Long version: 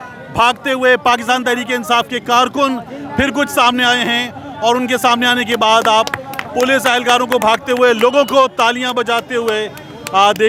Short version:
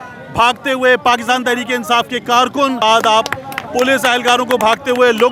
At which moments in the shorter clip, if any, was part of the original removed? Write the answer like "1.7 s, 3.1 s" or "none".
2.8 s